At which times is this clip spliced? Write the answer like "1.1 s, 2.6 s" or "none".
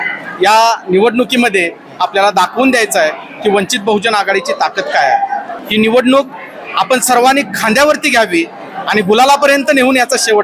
5.6 s